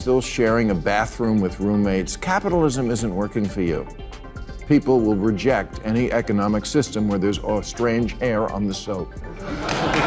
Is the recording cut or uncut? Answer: uncut